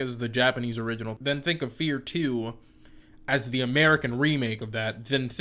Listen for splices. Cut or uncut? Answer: cut